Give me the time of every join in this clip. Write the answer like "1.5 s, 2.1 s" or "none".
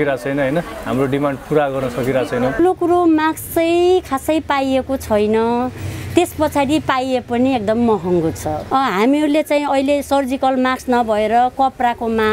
2.6 s, 8.6 s